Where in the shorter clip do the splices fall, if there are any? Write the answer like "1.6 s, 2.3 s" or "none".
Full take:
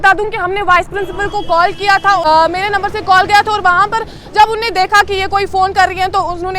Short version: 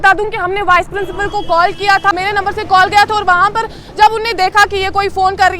2.1 s

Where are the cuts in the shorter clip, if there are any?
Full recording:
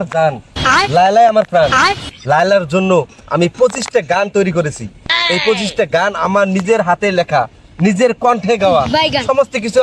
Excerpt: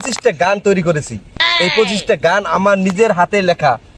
none

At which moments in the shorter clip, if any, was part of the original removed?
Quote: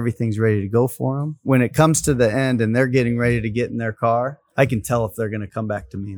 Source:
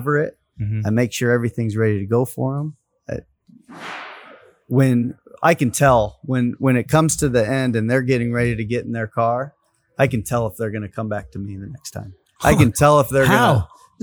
1.4 s, 4.4 s

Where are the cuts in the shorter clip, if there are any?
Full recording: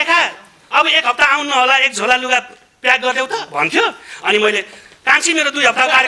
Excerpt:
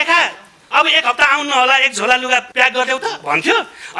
2.5 s

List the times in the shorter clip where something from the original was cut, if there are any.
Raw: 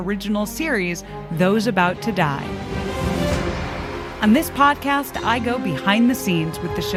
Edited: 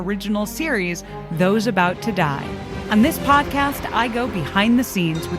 2.7 s

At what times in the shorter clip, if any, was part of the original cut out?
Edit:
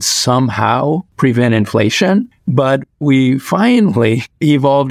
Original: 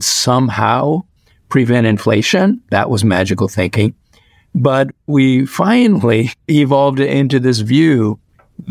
1.1 s, 2.3 s

